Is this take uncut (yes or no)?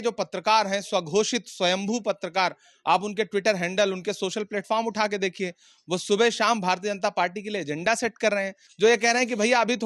no